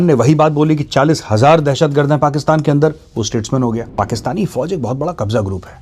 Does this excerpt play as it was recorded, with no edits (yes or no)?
no